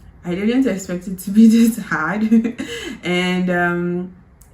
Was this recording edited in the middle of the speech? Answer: no; 0 cuts

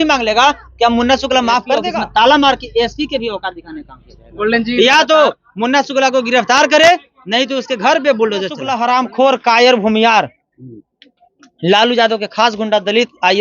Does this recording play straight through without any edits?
no; 2 cuts; at 1.9 s, 8.6 s

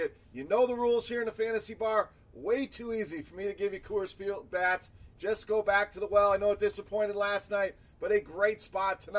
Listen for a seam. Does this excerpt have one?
no; 0 cuts

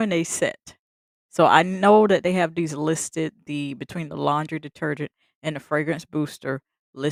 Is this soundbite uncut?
yes; 0 cuts

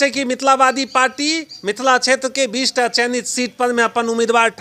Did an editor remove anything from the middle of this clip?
no; 0 cuts

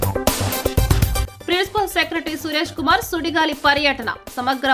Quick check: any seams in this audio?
yes; 1 cut; at 1.3 s

